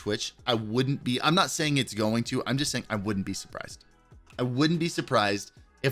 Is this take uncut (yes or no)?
yes